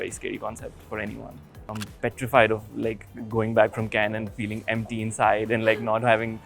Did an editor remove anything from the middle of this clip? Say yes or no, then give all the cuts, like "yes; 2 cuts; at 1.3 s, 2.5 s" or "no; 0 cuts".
yes; 1 cut; at 1.7 s